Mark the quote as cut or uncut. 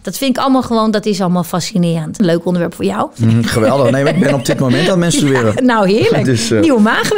cut